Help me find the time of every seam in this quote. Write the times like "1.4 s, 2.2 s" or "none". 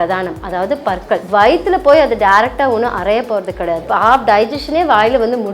1.2 s, 3.8 s